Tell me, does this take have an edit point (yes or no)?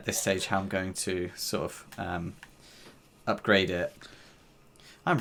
no